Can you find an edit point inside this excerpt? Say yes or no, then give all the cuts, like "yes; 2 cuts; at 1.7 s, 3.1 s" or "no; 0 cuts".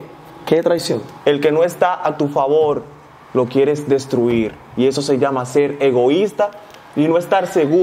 yes; 1 cut; at 1.1 s